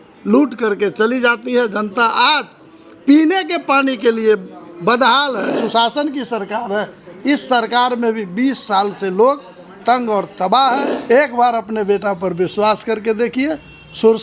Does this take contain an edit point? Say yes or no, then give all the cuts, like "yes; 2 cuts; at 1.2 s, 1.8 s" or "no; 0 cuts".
yes; 2 cuts; at 5.6 s, 10.9 s